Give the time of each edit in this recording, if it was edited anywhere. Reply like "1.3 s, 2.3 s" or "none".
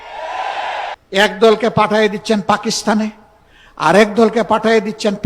1.0 s

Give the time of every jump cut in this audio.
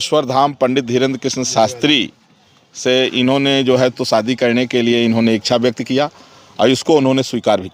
none

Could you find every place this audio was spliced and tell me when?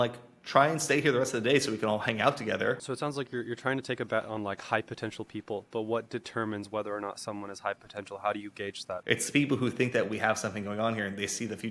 2.8 s, 8.9 s

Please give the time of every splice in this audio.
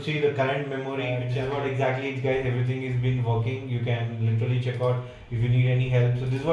1.3 s

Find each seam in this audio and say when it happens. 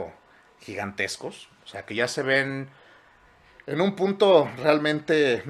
none

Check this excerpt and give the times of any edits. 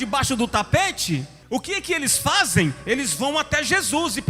1.3 s

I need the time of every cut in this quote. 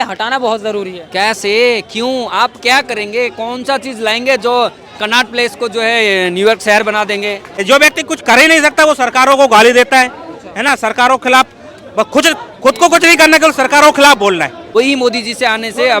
7.5 s, 14.6 s

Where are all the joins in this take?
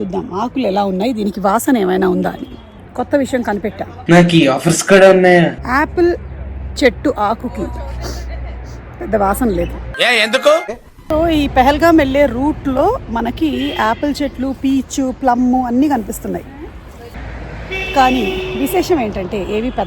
none

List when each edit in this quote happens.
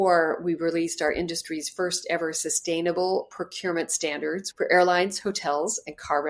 4.5 s

